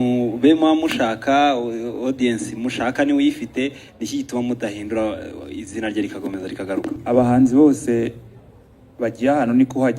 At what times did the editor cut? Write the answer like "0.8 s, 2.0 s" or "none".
7.0 s